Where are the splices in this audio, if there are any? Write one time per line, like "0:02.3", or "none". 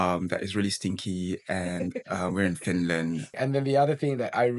0:03.3